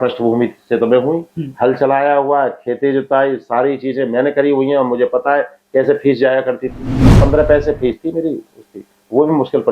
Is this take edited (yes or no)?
yes